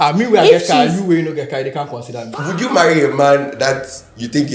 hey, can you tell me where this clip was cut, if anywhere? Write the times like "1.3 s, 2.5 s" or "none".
2.3 s